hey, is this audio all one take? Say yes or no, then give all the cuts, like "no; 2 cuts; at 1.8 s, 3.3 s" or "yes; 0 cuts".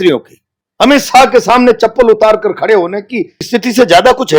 yes; 0 cuts